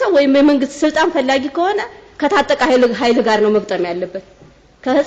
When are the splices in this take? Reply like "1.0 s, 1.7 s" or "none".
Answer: none